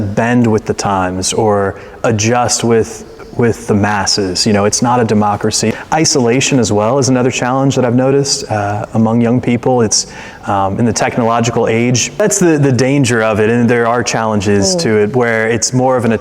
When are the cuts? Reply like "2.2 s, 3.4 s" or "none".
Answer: 5.7 s, 12.2 s